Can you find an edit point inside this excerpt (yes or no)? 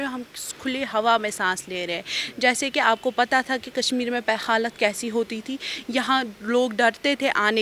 no